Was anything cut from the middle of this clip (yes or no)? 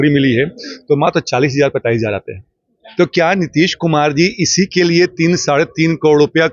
no